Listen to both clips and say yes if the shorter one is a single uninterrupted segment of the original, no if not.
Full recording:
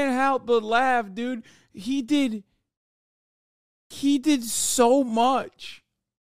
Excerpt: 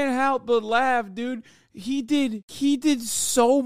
no